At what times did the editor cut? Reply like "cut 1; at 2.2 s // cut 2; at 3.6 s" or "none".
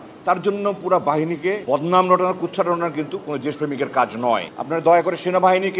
cut 1; at 1.6 s // cut 2; at 4.5 s

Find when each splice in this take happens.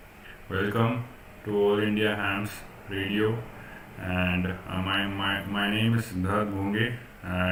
none

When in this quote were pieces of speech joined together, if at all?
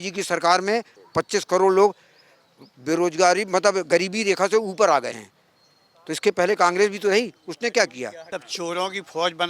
cut 1; at 1.0 s // cut 2; at 8.2 s

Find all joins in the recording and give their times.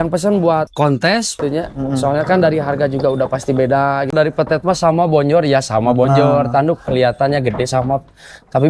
cut 1; at 4.1 s

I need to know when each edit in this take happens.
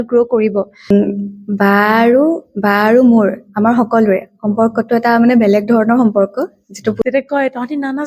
cut 1; at 0.9 s // cut 2; at 7.0 s

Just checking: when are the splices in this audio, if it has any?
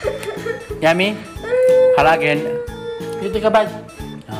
none

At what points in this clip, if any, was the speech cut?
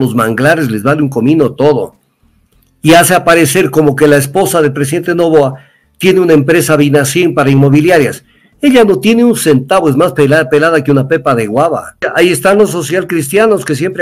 cut 1; at 11.9 s

